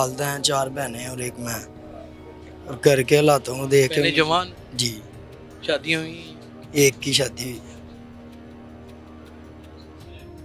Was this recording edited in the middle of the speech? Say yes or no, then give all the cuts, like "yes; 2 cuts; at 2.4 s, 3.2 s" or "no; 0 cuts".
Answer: no; 0 cuts